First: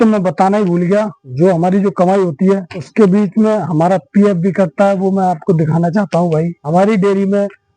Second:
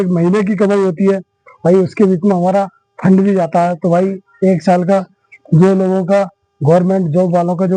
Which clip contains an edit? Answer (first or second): first